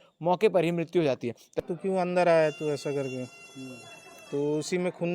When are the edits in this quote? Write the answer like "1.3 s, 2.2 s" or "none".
1.6 s